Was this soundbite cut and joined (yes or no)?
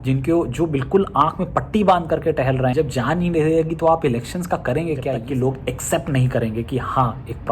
yes